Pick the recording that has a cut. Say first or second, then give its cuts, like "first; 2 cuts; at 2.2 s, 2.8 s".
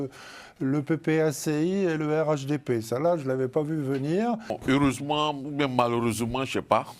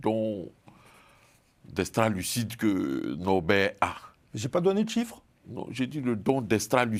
first; 1 cut; at 4.6 s